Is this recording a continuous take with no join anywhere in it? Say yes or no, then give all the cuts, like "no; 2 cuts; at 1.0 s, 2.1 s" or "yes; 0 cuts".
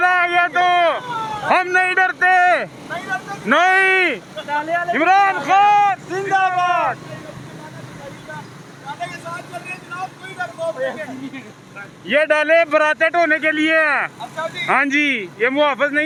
yes; 0 cuts